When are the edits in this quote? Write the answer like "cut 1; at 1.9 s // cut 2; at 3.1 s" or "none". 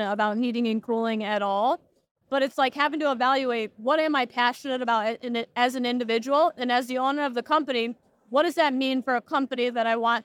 none